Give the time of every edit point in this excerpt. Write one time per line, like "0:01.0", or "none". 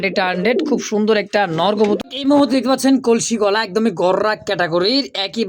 0:02.0